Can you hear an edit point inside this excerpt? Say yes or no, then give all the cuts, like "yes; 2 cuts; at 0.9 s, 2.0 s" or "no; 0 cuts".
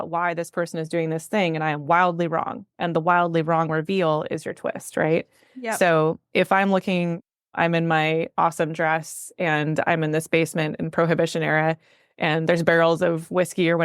no; 0 cuts